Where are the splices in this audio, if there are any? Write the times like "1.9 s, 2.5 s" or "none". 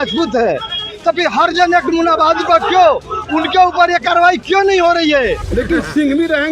5.4 s